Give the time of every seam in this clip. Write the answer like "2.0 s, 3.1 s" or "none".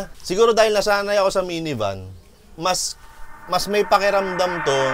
none